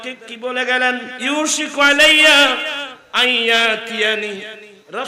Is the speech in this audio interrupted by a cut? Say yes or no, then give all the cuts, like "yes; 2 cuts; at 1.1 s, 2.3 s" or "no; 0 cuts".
yes; 1 cut; at 1.1 s